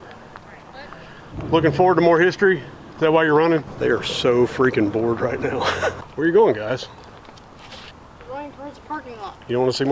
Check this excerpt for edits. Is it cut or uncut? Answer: cut